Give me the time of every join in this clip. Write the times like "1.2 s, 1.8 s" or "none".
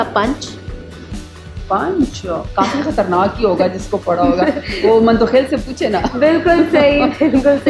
none